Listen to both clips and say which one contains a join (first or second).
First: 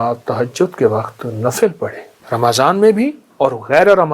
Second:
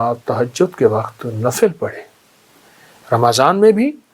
first